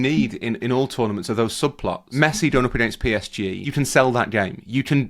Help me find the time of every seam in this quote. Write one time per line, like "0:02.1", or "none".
0:02.0
0:03.6